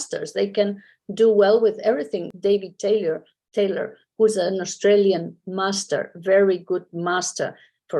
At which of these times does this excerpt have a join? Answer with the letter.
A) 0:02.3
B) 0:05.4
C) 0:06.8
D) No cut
A